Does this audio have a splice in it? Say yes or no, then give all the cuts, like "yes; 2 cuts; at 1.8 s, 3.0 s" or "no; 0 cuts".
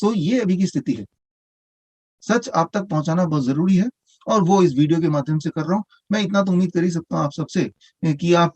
yes; 1 cut; at 1.5 s